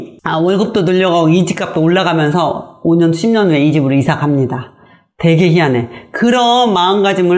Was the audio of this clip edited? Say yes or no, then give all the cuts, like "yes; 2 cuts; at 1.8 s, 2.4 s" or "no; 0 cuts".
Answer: no; 0 cuts